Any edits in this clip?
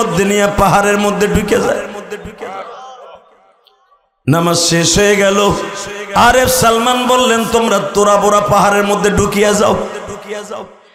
no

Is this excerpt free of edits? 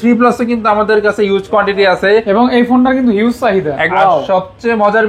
no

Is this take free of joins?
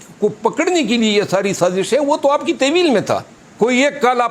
no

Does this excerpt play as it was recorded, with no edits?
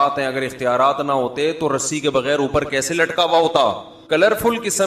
no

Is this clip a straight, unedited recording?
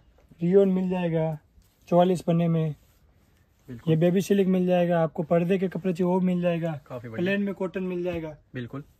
yes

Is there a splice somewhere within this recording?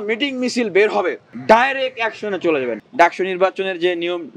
yes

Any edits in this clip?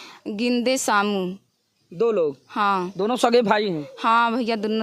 no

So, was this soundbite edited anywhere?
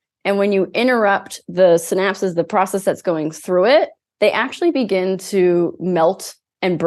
no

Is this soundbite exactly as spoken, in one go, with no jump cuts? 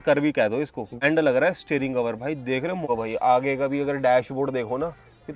no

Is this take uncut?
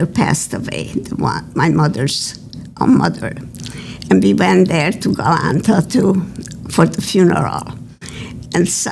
yes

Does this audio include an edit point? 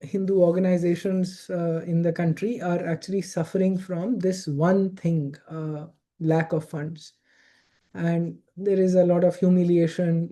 no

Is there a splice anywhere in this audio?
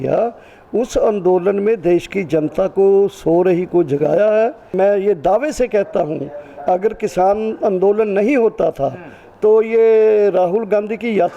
yes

